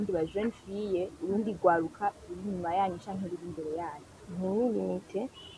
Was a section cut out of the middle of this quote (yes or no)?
yes